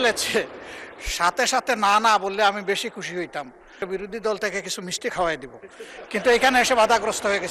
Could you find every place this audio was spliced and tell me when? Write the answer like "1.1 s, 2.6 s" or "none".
3.8 s